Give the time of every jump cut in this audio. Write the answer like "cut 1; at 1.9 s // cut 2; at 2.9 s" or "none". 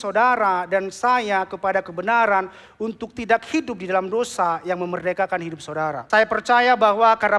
cut 1; at 6.0 s